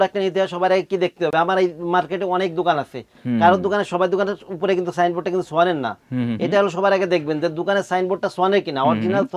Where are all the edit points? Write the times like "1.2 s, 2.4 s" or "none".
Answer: none